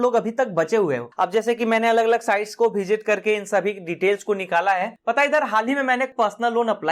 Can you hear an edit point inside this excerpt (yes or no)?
yes